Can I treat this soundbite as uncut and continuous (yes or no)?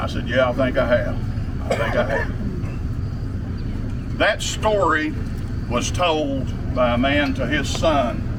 yes